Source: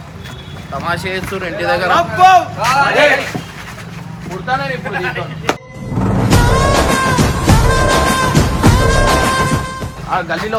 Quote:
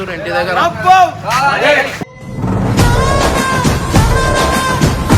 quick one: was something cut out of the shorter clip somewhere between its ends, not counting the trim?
yes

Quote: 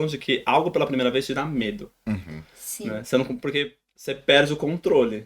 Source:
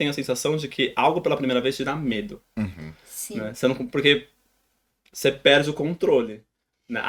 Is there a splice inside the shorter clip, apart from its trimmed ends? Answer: yes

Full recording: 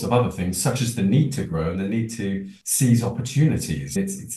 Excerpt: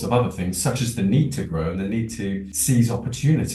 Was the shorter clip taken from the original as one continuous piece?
no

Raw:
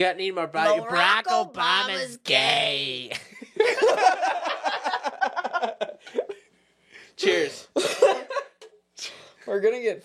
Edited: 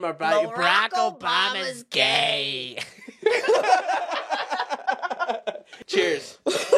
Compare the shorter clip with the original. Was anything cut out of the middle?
yes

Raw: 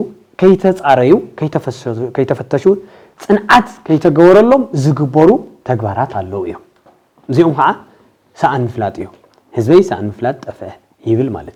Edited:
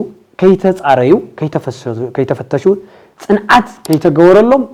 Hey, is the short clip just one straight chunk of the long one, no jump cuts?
yes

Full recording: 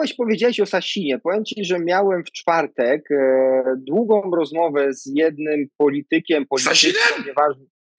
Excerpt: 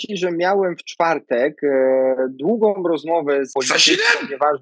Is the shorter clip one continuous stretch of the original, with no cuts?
no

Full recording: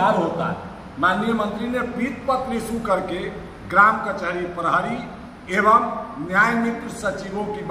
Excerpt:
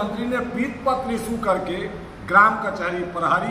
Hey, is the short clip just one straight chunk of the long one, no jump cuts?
yes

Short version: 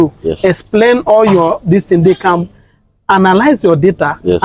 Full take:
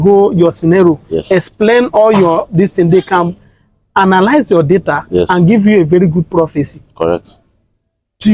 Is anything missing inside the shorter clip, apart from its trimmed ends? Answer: no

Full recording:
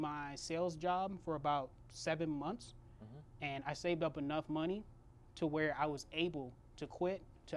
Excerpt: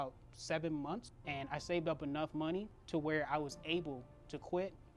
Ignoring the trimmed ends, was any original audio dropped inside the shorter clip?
yes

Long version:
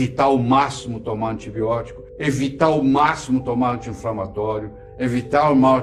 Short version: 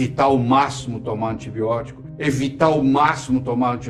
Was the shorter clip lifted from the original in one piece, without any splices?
yes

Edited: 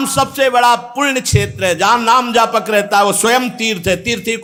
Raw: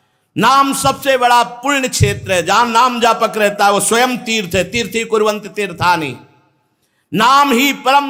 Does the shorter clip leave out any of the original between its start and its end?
no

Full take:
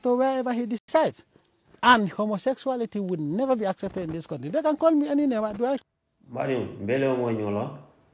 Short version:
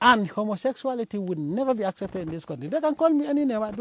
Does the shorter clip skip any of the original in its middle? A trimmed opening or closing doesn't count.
no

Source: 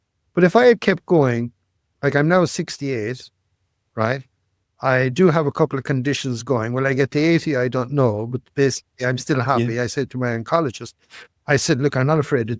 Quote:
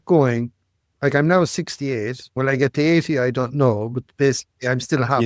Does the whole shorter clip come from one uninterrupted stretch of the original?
no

